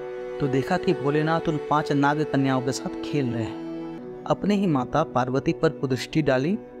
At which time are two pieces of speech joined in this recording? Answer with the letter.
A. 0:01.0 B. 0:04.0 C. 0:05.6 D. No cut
B